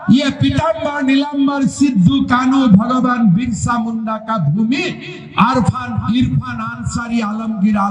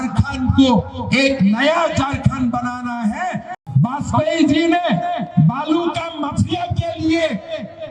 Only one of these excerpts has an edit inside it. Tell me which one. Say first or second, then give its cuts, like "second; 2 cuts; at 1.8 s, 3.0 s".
second; 1 cut; at 3.5 s